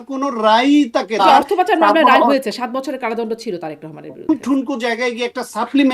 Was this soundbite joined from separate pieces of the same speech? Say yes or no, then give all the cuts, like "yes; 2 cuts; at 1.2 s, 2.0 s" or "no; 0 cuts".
yes; 2 cuts; at 1.2 s, 4.3 s